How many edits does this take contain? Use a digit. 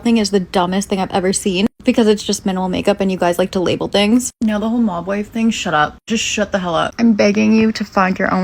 1